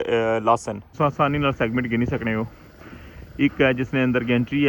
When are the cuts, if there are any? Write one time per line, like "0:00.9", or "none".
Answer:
0:00.9